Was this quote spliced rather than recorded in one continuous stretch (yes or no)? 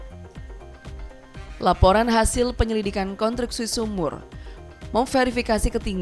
yes